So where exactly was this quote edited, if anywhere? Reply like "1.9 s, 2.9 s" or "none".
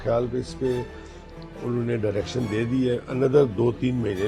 none